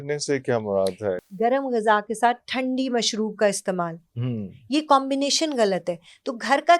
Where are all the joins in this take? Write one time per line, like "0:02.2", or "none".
0:01.2

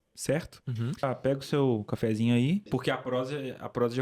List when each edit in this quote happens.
0:01.0
0:02.7

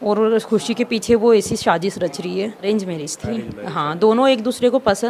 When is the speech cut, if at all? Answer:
0:02.7

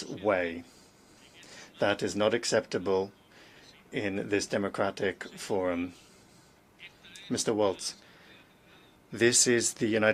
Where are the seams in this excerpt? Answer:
none

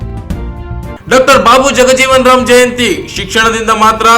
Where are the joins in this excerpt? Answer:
0:01.0

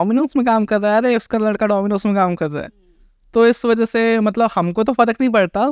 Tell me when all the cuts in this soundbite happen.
none

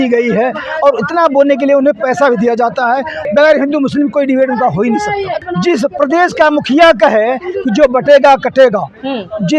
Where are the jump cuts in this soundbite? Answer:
0:03.2
0:05.4

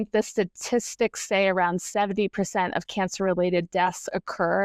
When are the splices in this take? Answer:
none

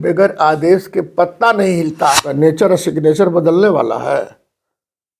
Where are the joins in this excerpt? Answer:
0:02.3

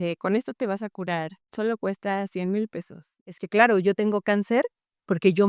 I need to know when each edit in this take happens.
0:03.4

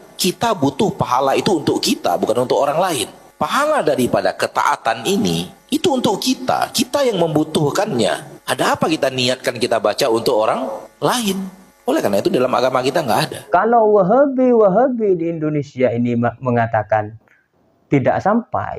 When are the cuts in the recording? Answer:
0:13.4

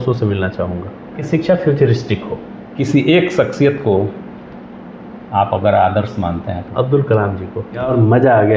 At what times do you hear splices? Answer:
0:01.2
0:02.7
0:06.6
0:07.6

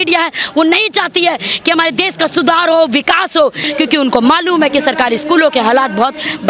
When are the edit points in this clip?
0:03.6

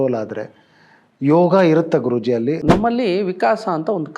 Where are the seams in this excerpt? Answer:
0:02.6

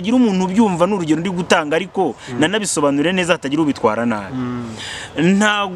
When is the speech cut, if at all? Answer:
none

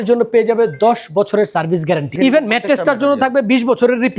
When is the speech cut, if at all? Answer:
0:02.2

